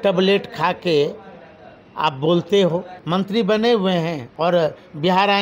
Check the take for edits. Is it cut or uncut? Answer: cut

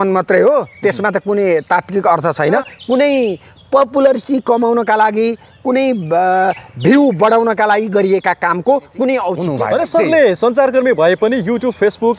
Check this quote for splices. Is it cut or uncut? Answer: cut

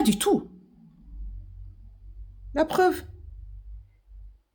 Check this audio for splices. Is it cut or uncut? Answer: uncut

